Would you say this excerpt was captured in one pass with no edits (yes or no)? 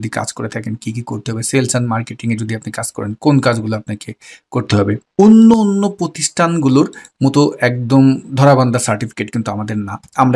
no